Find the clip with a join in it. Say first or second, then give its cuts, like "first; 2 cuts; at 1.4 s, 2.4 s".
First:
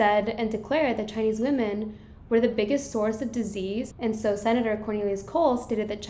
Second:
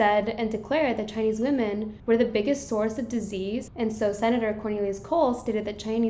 second; 1 cut; at 1.9 s